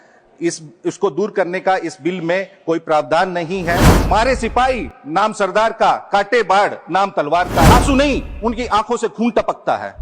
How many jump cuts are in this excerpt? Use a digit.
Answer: 2